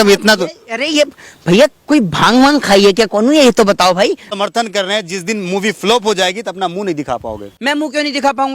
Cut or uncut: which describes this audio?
cut